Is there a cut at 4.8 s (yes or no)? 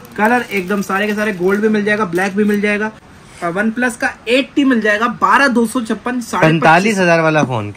no